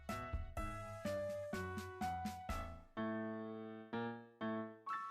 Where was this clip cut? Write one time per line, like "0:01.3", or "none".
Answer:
0:02.3